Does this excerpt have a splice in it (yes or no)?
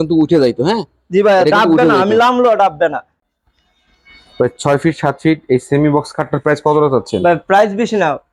yes